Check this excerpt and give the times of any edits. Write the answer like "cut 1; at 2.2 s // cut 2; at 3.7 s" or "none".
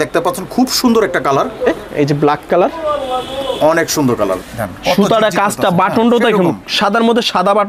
cut 1; at 1.8 s // cut 2; at 4.4 s